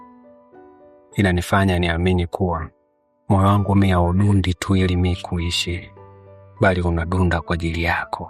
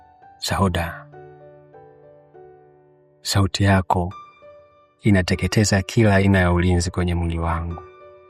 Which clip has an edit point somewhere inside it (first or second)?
second